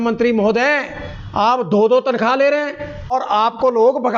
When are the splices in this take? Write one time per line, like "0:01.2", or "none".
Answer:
0:03.1